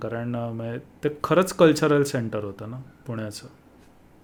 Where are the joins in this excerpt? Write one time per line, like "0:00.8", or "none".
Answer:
none